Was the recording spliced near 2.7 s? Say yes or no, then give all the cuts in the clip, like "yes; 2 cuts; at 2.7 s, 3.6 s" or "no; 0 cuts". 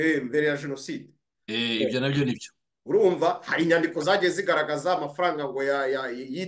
no; 0 cuts